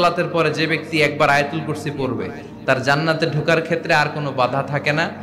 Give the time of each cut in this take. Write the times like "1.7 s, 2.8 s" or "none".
none